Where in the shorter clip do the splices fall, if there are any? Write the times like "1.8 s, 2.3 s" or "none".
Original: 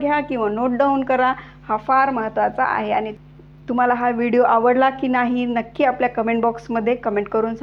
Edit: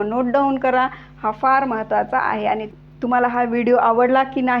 2.8 s